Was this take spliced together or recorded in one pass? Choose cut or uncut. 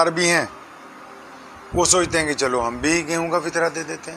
uncut